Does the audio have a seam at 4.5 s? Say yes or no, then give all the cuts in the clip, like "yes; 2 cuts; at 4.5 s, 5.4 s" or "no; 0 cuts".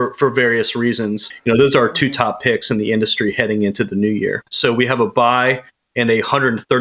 yes; 2 cuts; at 1.3 s, 4.5 s